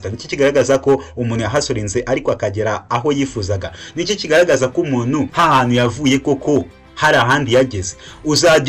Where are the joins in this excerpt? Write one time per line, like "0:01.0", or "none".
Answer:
0:05.3